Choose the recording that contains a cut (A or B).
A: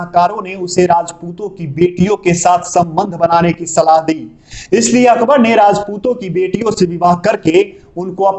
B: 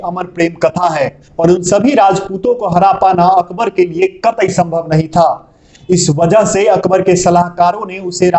B